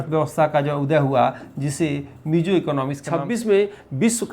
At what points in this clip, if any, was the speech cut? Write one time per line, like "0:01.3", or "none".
0:03.0